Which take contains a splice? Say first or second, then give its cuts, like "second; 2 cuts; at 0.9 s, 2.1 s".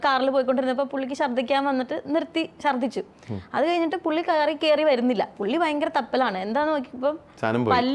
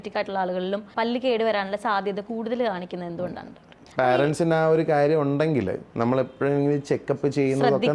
second; 3 cuts; at 0.9 s, 3.8 s, 5.8 s